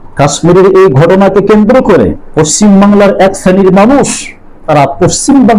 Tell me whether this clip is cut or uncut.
cut